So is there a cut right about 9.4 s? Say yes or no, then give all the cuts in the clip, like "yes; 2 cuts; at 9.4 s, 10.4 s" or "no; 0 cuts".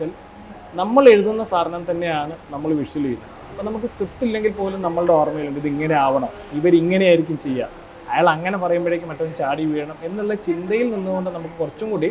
no; 0 cuts